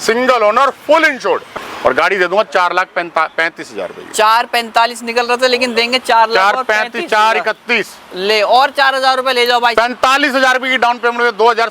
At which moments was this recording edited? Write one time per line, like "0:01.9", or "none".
0:01.5
0:09.7